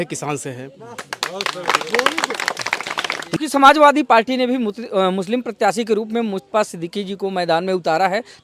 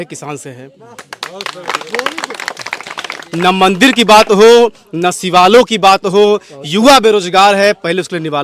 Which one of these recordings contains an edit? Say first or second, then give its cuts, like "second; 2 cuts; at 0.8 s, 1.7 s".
first; 1 cut; at 3.2 s